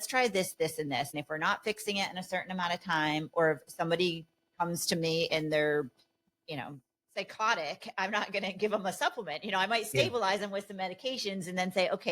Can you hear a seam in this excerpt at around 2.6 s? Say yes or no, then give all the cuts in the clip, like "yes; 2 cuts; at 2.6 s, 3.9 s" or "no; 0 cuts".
no; 1 cut; at 1.2 s